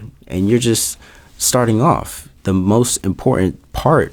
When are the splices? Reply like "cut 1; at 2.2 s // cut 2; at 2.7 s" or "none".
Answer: none